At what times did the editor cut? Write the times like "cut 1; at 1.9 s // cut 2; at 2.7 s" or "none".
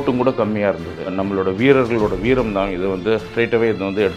cut 1; at 1.1 s // cut 2; at 3.3 s